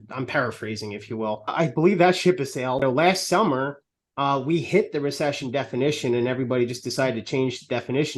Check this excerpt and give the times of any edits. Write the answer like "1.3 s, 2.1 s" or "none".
1.5 s, 2.8 s